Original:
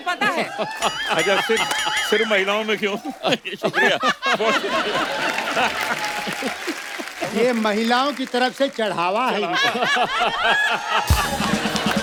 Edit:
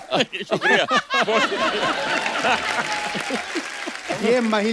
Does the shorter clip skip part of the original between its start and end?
no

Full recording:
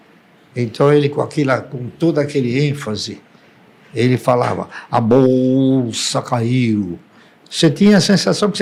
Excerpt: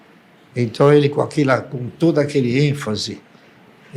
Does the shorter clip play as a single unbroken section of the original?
yes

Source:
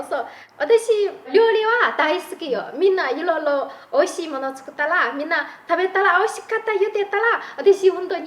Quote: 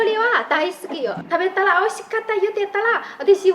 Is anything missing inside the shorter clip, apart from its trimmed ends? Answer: yes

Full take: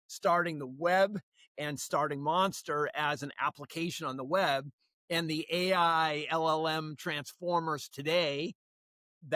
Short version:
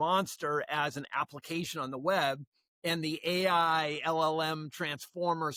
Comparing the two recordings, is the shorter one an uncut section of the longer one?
yes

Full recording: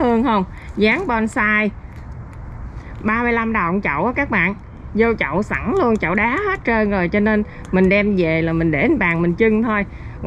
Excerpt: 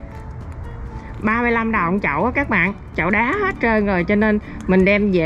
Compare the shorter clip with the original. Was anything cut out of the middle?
yes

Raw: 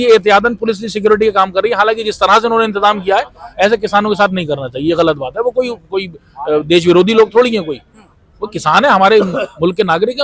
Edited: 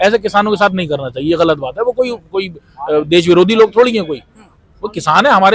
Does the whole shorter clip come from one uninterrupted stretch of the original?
yes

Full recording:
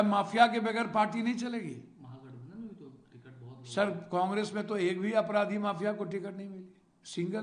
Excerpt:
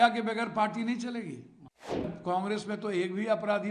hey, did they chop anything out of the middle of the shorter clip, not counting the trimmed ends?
yes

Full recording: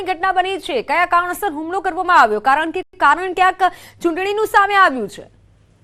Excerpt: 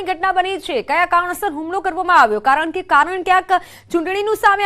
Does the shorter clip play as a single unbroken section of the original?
no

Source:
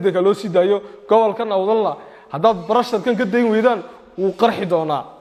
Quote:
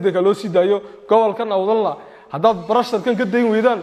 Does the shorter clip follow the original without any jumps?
yes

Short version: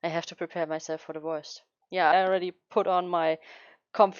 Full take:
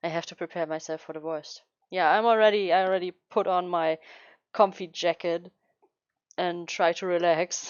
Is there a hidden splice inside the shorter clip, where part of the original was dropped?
yes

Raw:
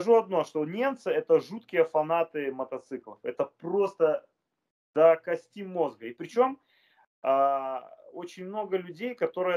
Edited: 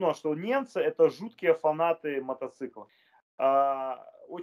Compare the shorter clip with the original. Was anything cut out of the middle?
yes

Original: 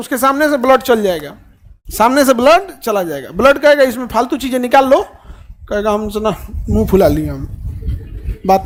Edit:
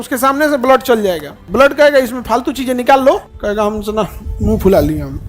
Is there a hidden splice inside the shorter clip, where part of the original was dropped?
yes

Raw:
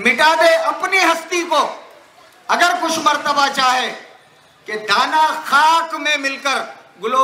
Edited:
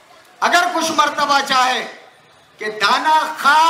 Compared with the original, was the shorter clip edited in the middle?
no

